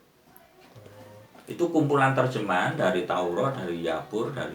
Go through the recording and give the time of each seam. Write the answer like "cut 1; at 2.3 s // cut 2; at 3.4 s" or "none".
none